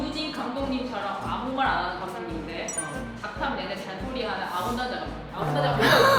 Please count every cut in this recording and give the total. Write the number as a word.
zero